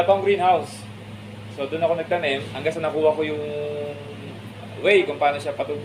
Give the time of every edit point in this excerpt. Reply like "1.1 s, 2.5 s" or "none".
2.5 s